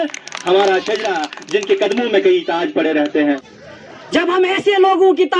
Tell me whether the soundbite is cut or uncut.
cut